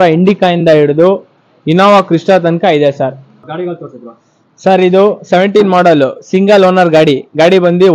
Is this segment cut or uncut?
uncut